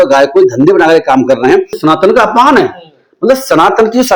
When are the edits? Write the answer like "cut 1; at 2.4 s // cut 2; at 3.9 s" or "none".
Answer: cut 1; at 1.8 s